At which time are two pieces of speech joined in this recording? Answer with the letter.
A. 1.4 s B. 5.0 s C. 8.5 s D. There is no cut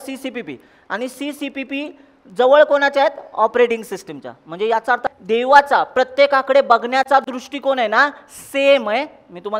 B